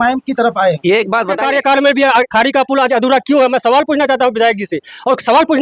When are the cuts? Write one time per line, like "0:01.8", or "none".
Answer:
0:01.4